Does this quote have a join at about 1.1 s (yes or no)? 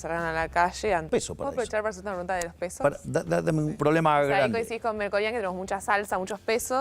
yes